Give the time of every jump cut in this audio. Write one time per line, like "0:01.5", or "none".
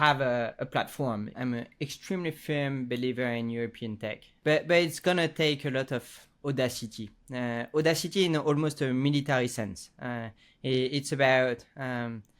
0:01.3
0:04.3